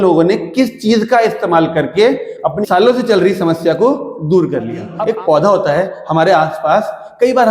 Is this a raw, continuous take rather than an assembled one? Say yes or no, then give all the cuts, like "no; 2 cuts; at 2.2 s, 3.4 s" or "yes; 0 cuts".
no; 1 cut; at 4.9 s